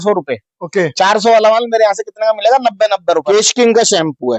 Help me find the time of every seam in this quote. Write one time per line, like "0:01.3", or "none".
0:03.3